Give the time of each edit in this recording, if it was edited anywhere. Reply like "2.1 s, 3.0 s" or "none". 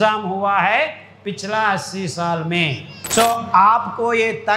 2.9 s